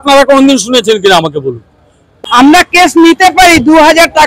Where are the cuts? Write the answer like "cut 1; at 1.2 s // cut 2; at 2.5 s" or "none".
cut 1; at 2.1 s